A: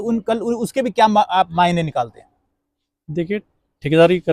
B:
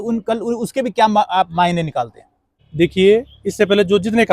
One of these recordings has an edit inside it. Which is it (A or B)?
B